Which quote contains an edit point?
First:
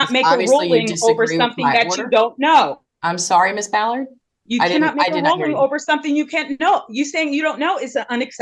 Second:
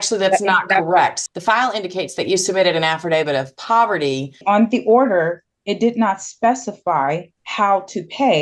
second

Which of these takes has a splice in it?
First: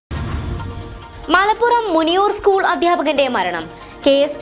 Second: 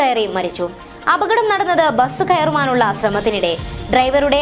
first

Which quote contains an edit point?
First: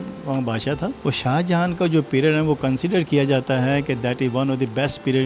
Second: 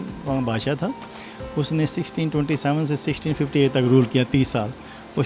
first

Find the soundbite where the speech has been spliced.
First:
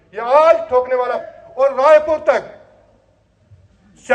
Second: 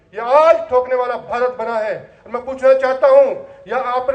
first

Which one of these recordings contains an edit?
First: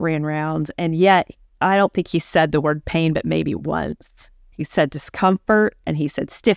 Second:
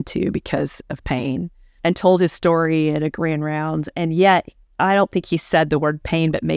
second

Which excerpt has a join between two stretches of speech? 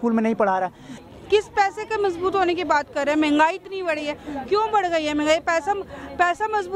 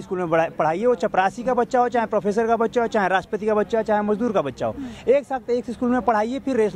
first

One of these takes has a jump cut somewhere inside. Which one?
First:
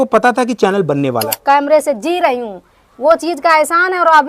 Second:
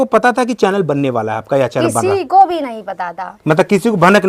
first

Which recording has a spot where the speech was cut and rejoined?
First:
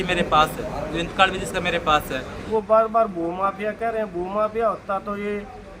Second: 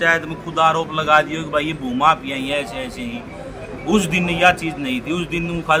first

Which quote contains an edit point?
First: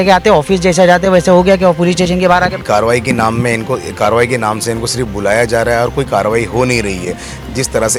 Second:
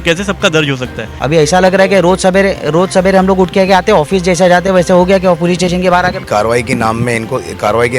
second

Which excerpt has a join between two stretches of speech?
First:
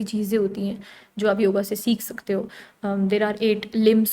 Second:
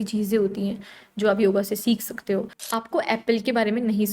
second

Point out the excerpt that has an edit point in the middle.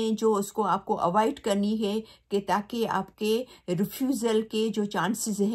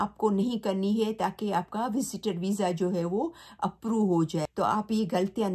second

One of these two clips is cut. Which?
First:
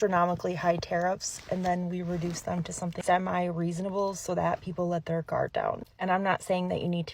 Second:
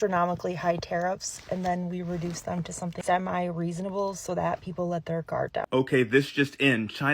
second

